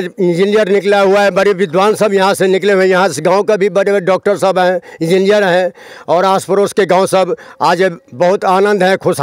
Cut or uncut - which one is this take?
uncut